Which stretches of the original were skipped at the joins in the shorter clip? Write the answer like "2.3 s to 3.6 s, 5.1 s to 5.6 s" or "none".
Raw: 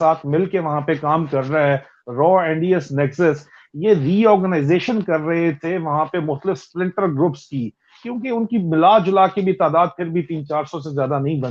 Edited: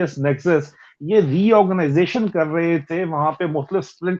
none